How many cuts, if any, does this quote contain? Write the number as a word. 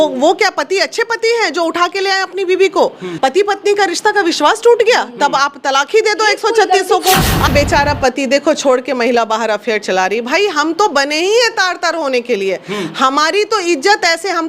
two